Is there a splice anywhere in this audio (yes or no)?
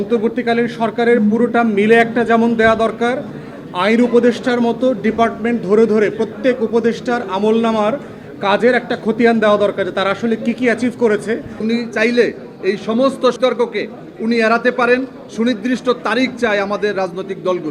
yes